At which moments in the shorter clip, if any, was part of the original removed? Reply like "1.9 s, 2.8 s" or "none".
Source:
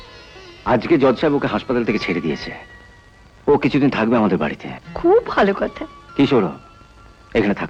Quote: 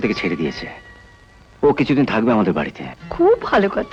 none